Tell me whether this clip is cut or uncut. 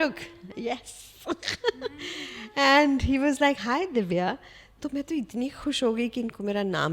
uncut